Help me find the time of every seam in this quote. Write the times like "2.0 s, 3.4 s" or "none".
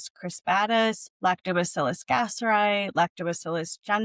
1.1 s